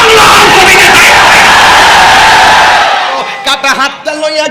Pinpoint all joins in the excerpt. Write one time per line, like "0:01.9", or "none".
0:03.3